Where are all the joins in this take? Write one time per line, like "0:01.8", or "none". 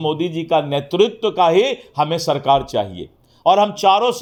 none